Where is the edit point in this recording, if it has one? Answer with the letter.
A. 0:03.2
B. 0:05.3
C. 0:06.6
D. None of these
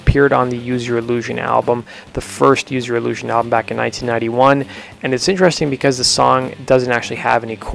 D